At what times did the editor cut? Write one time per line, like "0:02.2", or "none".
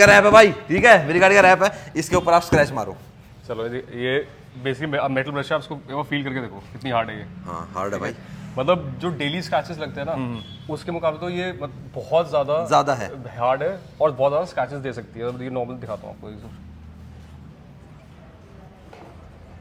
none